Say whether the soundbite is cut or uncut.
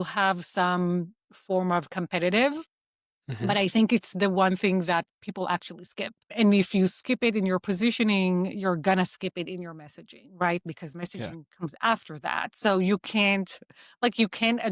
cut